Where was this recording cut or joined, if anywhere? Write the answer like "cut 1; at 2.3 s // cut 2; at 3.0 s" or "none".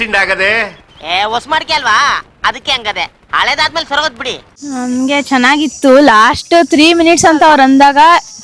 cut 1; at 4.6 s